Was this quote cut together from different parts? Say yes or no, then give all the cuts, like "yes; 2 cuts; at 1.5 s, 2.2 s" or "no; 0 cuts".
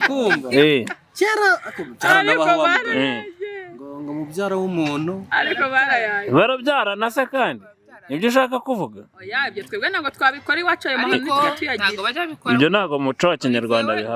no; 0 cuts